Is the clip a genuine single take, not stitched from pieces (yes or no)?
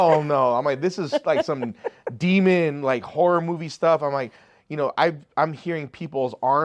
yes